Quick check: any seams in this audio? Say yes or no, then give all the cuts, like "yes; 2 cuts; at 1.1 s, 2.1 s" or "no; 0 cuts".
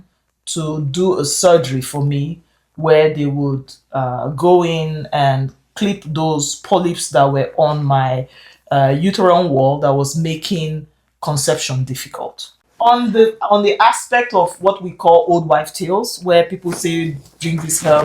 yes; 1 cut; at 12.6 s